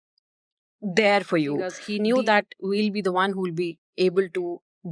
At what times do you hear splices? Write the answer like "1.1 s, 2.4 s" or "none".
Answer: 1.8 s